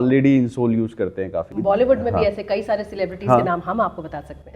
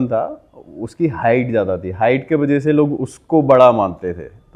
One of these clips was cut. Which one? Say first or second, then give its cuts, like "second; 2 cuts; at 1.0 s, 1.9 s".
first; 1 cut; at 1.5 s